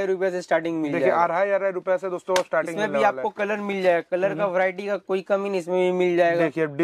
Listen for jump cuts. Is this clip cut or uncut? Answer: uncut